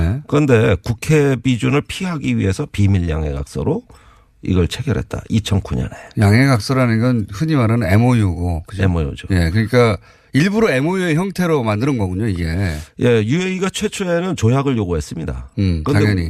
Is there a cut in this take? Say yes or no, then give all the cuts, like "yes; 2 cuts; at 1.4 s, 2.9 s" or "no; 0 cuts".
no; 0 cuts